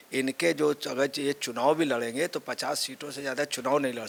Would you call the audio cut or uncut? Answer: uncut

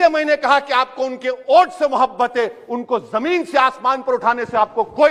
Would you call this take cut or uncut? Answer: uncut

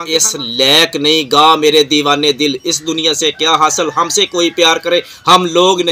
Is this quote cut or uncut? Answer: uncut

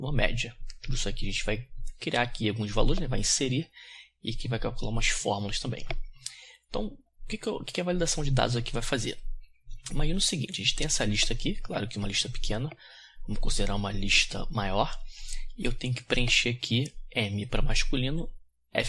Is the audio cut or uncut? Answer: cut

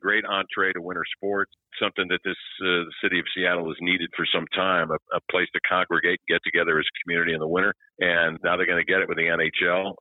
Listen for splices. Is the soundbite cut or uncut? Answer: cut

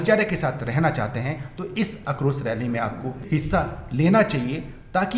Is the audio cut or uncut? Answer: cut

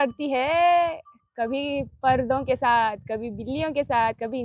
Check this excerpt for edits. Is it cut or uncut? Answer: uncut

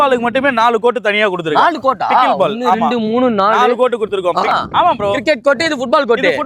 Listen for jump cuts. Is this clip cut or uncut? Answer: cut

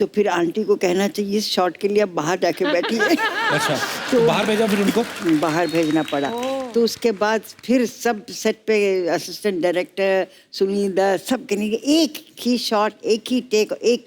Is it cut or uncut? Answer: uncut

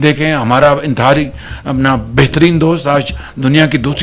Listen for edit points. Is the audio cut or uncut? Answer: uncut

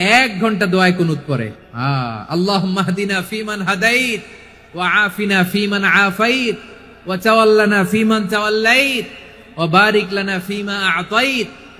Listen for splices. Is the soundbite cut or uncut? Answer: cut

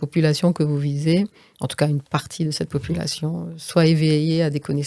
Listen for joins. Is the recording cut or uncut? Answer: uncut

